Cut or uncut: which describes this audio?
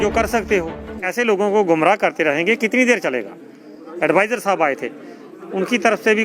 cut